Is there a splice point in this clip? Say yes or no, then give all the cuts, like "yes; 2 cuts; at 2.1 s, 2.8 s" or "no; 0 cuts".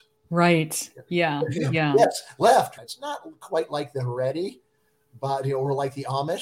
yes; 1 cut; at 2.7 s